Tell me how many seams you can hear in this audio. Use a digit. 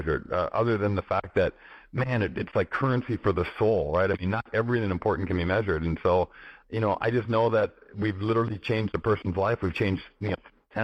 0